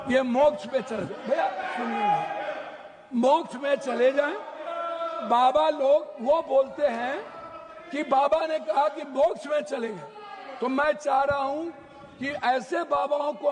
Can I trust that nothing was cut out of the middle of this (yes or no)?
yes